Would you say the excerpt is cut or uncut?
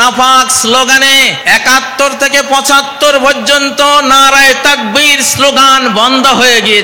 cut